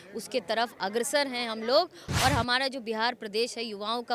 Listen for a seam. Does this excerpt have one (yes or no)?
yes